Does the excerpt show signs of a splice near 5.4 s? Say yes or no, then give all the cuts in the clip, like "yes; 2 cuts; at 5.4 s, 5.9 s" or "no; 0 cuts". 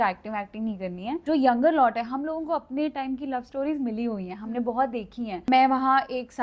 yes; 2 cuts; at 1.1 s, 5.4 s